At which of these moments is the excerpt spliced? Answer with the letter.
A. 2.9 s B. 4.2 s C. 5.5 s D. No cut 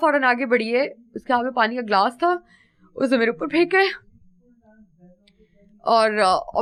D